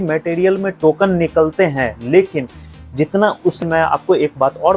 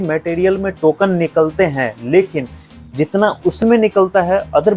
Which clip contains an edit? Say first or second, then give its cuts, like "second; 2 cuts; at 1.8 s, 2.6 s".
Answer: first; 1 cut; at 3.6 s